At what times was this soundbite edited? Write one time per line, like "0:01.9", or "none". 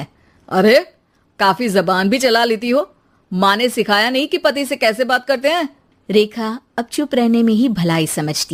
none